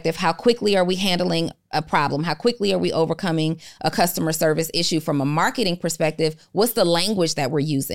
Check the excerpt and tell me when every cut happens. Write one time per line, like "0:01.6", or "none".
none